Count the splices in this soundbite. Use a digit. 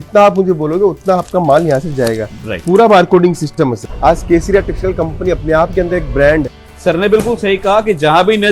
2